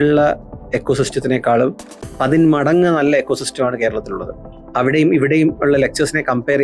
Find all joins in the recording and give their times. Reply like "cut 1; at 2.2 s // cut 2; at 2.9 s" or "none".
none